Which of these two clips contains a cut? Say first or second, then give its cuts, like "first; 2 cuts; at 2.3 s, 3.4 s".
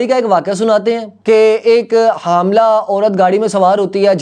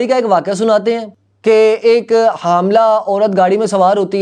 first; 1 cut; at 1.1 s